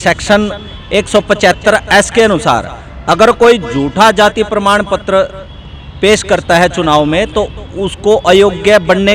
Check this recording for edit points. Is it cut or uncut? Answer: uncut